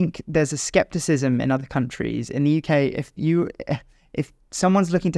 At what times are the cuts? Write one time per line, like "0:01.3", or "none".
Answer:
none